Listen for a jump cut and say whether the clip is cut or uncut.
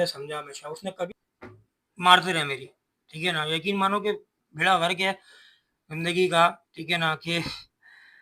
cut